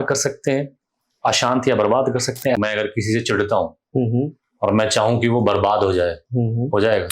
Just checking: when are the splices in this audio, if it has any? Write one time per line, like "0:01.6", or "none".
0:02.6